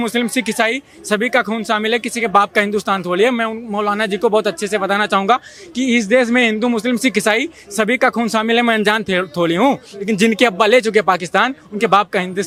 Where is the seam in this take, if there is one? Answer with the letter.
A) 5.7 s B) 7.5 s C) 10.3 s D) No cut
D